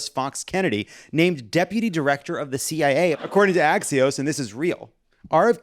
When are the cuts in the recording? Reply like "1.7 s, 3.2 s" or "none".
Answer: 3.2 s